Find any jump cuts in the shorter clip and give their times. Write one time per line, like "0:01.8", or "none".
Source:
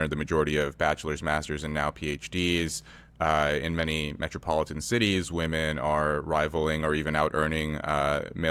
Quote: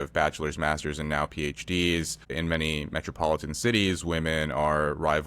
0:02.4